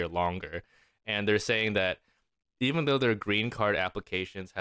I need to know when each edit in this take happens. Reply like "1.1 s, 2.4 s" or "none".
none